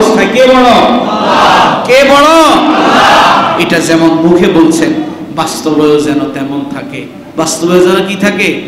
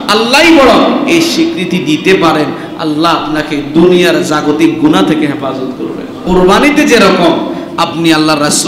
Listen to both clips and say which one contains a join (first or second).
second